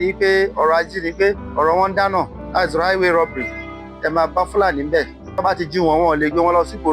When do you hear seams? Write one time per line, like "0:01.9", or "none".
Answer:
0:01.4
0:02.4
0:05.3